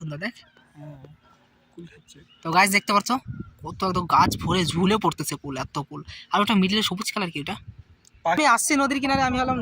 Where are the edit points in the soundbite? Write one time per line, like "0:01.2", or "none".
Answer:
0:08.4